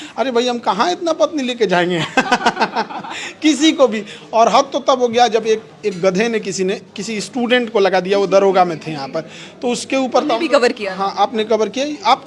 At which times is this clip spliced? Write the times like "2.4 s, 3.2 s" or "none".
none

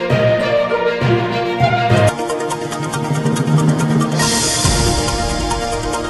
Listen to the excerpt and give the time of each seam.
2.1 s

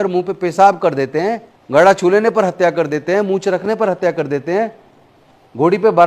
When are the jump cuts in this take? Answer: 1.5 s

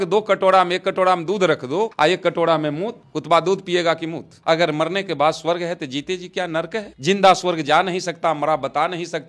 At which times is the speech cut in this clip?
1.9 s, 4.4 s

